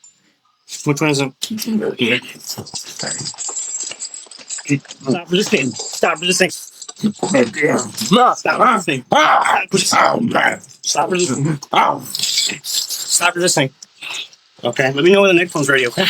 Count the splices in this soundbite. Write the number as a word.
zero